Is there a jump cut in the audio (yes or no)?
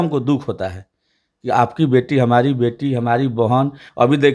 no